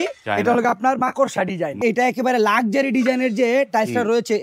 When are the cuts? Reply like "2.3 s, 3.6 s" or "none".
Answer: 1.8 s